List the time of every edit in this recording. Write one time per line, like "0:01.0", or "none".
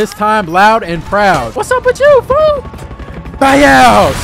0:01.9